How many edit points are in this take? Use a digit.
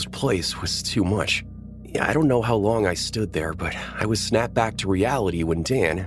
0